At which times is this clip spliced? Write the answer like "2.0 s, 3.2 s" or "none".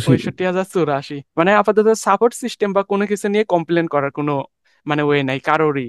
1.2 s